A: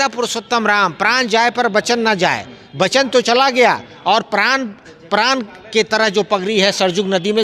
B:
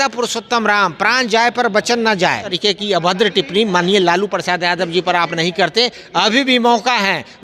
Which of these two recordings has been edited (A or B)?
B